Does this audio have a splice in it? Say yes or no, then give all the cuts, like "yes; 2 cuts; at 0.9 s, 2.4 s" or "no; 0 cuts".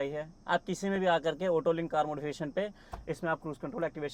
no; 0 cuts